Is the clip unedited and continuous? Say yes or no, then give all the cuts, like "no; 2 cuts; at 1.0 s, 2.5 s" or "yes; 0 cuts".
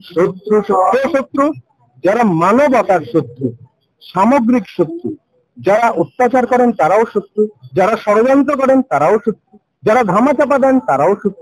yes; 0 cuts